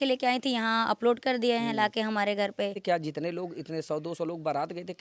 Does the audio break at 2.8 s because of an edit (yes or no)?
yes